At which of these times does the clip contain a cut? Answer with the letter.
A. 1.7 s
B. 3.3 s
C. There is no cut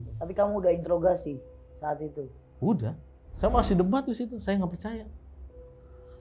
B